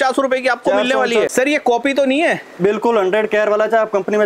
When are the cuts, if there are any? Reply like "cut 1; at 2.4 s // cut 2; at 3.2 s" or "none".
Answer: cut 1; at 1.3 s